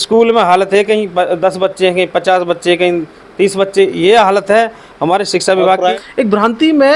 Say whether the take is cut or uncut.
cut